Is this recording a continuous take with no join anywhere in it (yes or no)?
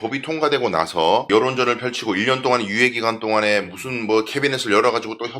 no